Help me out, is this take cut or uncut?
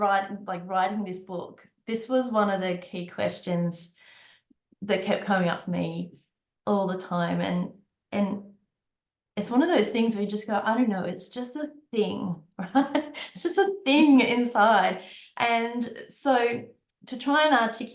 uncut